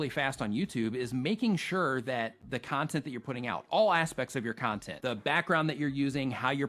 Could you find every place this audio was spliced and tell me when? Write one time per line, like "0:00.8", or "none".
none